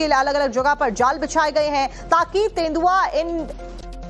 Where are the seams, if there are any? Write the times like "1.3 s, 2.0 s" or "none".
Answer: 2.5 s